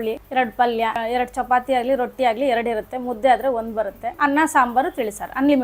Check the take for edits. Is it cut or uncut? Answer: uncut